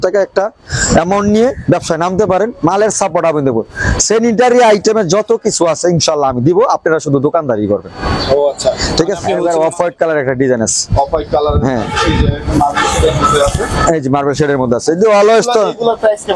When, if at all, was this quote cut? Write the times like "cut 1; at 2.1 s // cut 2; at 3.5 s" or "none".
cut 1; at 9.4 s